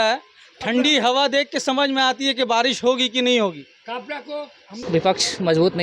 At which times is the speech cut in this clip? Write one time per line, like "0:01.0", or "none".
0:04.9